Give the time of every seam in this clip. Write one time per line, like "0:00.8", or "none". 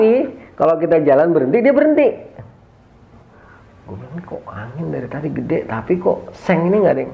0:03.4